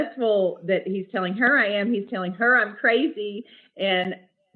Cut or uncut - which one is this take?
uncut